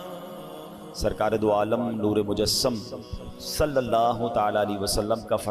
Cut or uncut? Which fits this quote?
cut